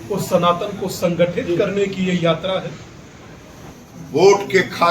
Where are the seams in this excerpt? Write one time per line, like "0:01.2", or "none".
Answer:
0:03.8